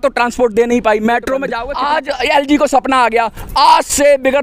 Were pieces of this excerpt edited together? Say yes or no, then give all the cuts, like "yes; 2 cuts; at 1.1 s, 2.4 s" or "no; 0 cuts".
yes; 1 cut; at 1.6 s